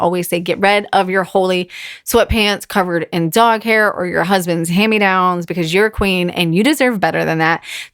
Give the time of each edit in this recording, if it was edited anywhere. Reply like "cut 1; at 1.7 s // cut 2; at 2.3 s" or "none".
none